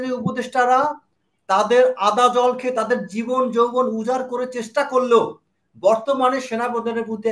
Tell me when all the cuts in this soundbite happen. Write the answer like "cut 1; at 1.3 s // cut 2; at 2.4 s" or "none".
none